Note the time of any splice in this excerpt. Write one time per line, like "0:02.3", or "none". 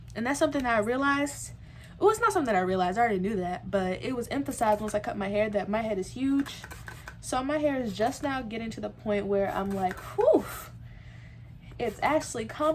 none